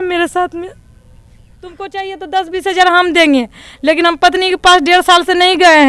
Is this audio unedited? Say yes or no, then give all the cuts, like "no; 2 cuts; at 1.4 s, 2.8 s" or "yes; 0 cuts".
no; 1 cut; at 1.8 s